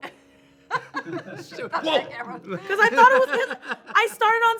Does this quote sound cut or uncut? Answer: uncut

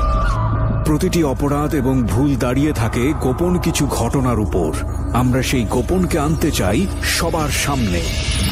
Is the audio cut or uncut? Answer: uncut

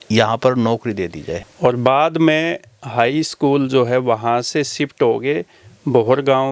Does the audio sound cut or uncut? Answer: cut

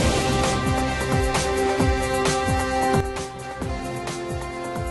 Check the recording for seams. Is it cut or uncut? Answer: uncut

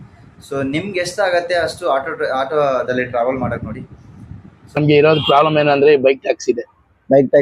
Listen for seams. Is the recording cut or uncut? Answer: cut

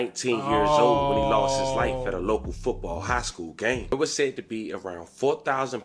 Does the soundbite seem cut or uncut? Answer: cut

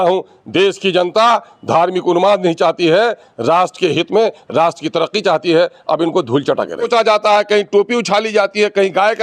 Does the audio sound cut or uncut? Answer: cut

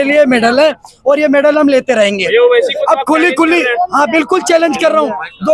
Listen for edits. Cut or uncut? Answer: uncut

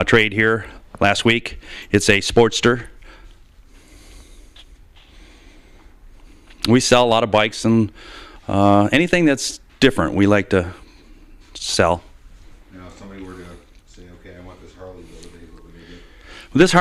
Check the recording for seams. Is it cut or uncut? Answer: uncut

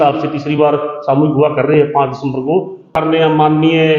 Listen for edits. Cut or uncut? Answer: cut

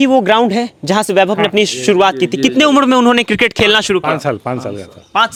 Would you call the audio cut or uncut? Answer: uncut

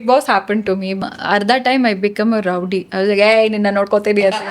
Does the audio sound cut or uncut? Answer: cut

